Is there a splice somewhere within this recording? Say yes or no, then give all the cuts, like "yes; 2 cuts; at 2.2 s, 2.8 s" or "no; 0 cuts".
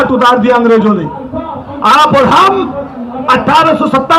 no; 0 cuts